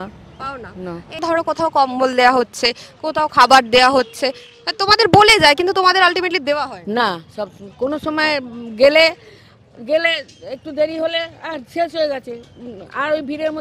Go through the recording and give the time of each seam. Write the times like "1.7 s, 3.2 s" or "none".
1.1 s

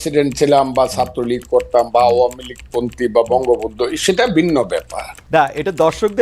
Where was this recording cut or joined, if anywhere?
5.2 s

